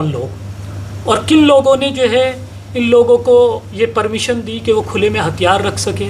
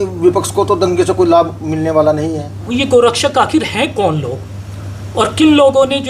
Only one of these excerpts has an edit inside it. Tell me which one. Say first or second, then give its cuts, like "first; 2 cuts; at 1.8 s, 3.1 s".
second; 1 cut; at 2.7 s